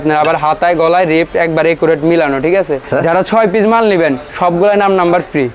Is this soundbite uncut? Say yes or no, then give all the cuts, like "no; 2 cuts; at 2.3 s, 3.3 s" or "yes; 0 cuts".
no; 1 cut; at 2.9 s